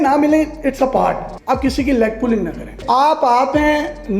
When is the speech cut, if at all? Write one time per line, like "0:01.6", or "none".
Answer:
0:01.3
0:02.7